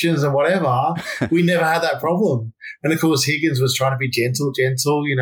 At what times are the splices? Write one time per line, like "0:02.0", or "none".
none